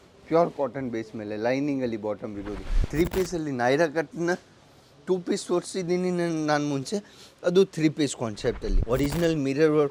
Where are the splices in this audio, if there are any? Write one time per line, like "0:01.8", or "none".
0:02.8
0:08.7